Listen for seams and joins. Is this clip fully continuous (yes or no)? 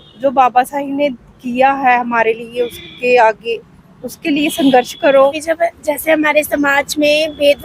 no